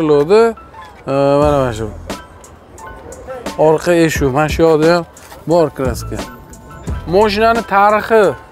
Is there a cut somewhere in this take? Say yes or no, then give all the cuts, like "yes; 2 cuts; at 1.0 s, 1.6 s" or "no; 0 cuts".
yes; 2 cuts; at 3.4 s, 6.9 s